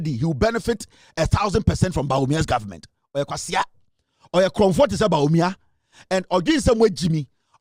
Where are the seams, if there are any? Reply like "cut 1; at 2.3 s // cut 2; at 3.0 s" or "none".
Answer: none